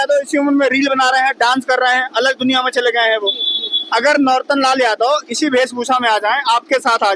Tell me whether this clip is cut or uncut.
uncut